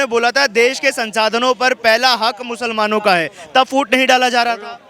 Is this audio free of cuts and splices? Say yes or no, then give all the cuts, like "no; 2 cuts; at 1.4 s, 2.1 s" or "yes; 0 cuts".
yes; 0 cuts